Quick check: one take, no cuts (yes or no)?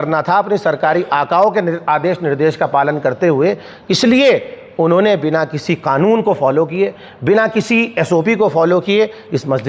yes